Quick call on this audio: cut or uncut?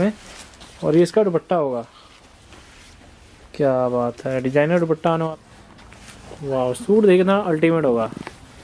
cut